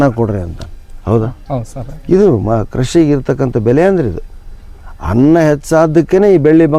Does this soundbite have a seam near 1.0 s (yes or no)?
no